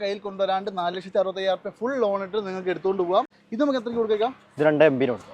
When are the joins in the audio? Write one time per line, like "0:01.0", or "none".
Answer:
0:03.4